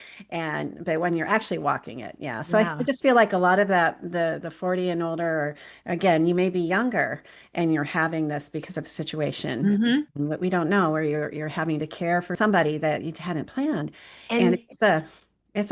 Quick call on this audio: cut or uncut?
cut